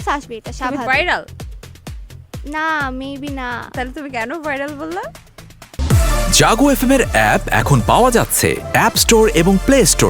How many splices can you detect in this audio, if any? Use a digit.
1